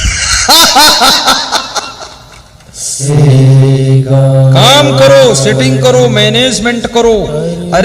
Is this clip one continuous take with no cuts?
no; 1 cut; at 3.1 s

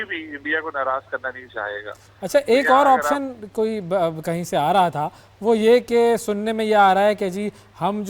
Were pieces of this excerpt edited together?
no; 0 cuts

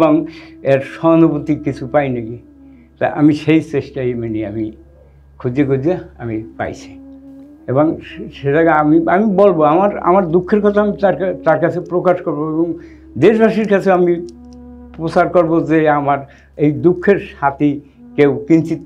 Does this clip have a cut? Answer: no; 0 cuts

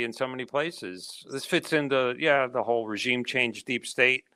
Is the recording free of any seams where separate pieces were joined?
yes; 0 cuts

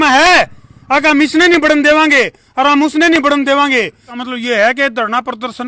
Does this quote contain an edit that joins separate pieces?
yes; 1 cut; at 4.1 s

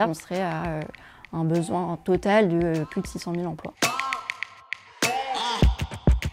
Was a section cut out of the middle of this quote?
no; 0 cuts

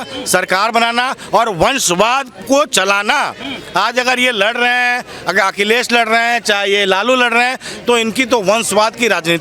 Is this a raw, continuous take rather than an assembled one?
yes; 0 cuts

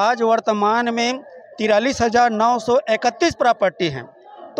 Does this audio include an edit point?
no; 0 cuts

